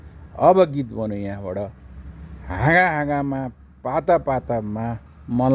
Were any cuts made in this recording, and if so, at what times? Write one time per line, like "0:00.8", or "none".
none

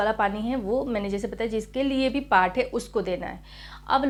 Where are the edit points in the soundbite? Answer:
none

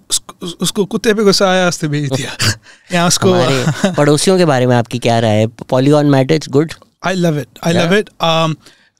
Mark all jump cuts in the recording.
none

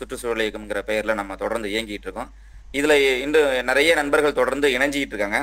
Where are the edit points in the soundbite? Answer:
none

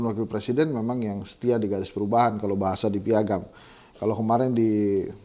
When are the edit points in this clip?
none

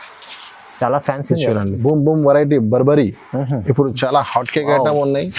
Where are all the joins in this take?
0:01.7

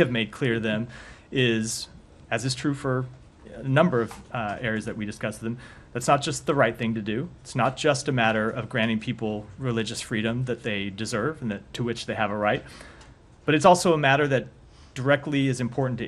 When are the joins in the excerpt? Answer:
0:04.6
0:09.6
0:14.6

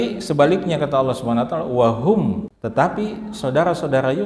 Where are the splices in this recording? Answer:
0:02.5

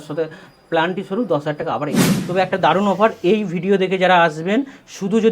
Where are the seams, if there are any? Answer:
0:02.1

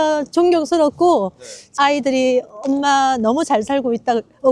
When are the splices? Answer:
0:01.7

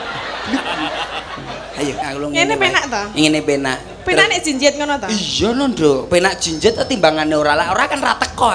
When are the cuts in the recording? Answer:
0:02.0

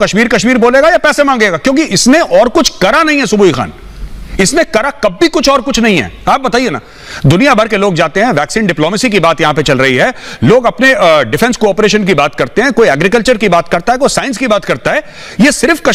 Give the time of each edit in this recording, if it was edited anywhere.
none

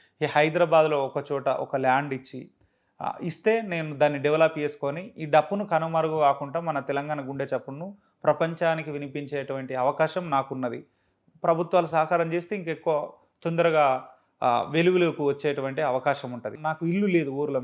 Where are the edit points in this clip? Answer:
0:16.6

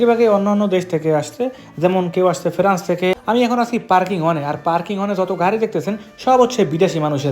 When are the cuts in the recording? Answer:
0:03.2

